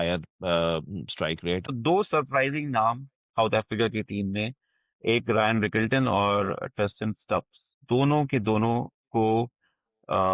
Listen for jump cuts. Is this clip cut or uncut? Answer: cut